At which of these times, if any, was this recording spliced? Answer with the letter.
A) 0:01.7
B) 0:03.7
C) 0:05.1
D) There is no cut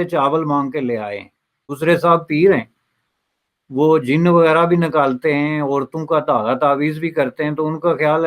A